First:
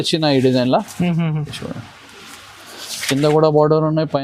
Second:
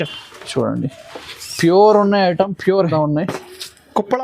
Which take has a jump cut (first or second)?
second